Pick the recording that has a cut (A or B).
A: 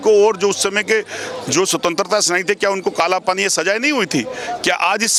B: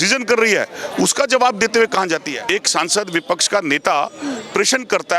B